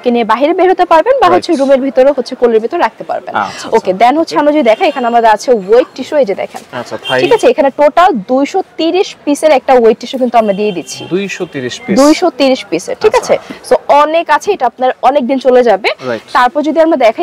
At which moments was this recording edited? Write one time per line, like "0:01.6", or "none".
none